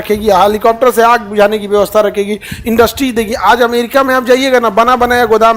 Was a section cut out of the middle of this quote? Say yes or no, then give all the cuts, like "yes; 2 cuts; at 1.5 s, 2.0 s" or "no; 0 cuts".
no; 0 cuts